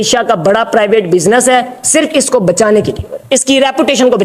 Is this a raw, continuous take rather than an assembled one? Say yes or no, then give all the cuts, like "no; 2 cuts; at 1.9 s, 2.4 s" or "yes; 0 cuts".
yes; 0 cuts